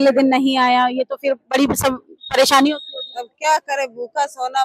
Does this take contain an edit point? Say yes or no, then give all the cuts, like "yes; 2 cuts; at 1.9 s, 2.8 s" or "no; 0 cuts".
no; 0 cuts